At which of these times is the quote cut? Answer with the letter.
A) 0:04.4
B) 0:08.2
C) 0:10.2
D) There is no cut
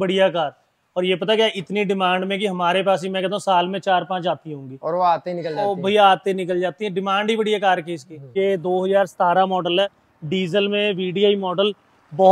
B